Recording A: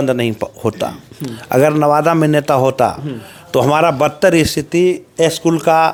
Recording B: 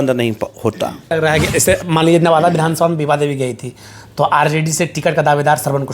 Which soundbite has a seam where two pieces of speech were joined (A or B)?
B